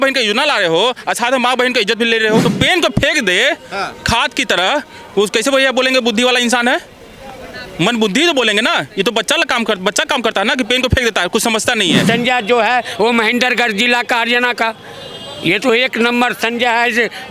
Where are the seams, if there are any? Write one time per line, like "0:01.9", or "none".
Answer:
0:02.5
0:12.0